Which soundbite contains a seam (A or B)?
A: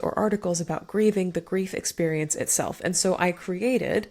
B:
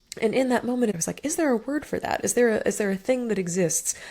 B